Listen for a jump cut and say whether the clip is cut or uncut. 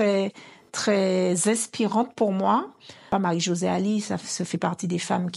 cut